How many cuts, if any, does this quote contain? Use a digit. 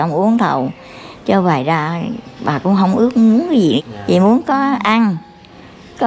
1